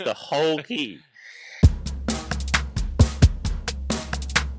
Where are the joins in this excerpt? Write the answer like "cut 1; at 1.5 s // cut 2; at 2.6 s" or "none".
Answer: cut 1; at 1.5 s